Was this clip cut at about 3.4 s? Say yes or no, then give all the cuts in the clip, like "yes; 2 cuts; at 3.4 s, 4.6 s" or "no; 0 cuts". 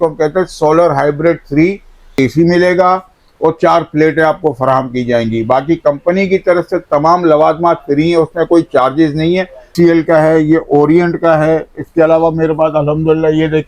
no; 2 cuts; at 2.1 s, 9.7 s